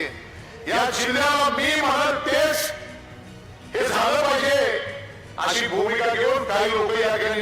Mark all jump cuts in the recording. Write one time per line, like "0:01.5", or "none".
none